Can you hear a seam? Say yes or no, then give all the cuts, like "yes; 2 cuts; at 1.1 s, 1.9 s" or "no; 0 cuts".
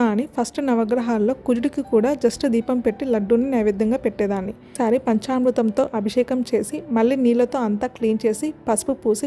yes; 1 cut; at 4.8 s